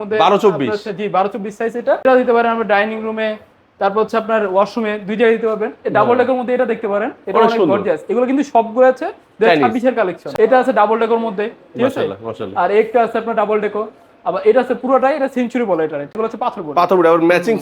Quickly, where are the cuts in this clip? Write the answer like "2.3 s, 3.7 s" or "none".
2.0 s, 10.2 s, 16.1 s